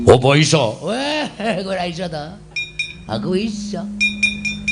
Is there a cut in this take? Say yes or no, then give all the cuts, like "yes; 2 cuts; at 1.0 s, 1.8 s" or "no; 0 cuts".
yes; 1 cut; at 1.1 s